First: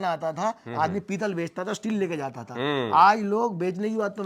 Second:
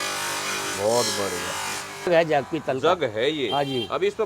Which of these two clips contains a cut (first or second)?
second